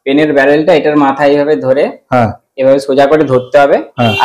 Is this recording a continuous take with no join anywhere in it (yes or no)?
yes